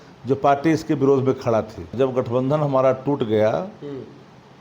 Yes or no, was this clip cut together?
yes